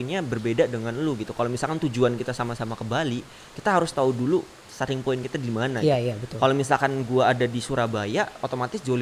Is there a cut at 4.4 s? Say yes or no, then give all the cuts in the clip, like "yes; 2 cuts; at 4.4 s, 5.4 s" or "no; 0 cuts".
no; 0 cuts